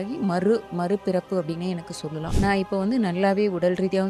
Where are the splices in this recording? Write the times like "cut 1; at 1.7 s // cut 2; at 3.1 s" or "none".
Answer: cut 1; at 2.2 s